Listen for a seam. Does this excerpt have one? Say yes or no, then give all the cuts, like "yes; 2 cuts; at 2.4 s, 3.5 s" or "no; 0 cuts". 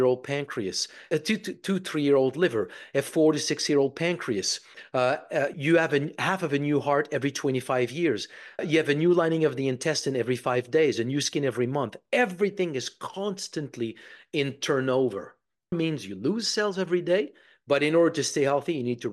yes; 4 cuts; at 1.0 s, 5.5 s, 8.6 s, 15.7 s